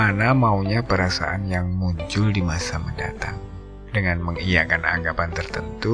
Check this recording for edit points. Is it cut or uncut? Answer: cut